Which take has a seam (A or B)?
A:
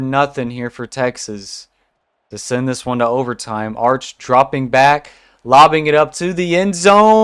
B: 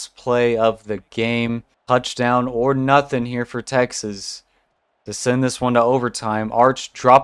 B